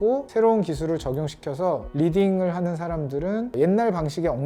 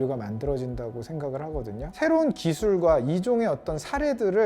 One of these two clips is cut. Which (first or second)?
second